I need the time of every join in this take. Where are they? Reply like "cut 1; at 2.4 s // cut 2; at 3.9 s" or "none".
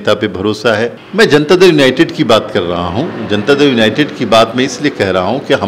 cut 1; at 1.0 s